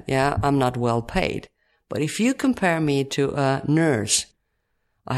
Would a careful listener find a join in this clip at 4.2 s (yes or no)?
yes